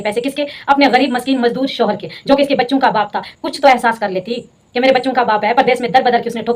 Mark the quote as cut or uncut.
uncut